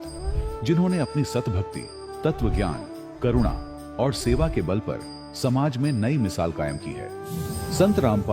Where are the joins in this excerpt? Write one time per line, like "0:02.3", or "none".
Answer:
0:02.6